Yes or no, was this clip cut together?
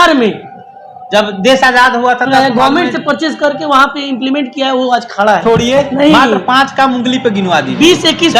yes